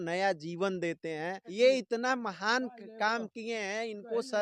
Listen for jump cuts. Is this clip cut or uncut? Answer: cut